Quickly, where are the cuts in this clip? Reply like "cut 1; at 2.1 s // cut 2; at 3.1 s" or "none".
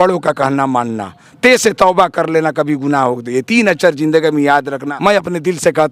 cut 1; at 4.8 s

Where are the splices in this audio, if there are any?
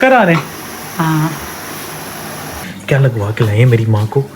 cut 1; at 2.6 s

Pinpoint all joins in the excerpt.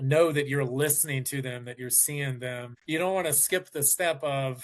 cut 1; at 2.7 s

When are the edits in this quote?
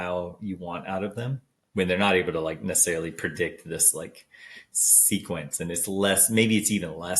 cut 1; at 1.5 s

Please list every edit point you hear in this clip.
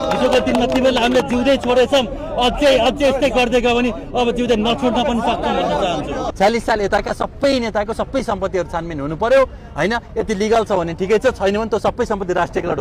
cut 1; at 6.3 s

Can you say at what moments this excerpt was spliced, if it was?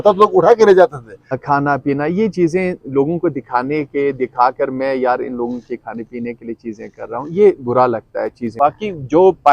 cut 1; at 1.4 s // cut 2; at 8.5 s

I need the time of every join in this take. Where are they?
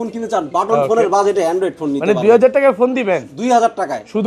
none

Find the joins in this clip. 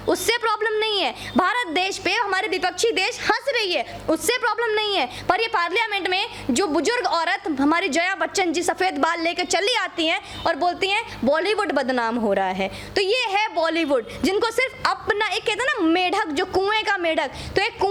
none

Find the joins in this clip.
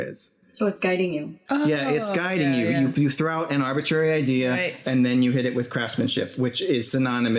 cut 1; at 1.3 s

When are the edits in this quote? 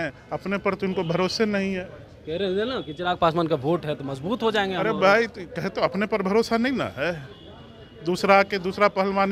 none

